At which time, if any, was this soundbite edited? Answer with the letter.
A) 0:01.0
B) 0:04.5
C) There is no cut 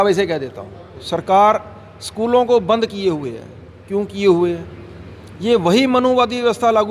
A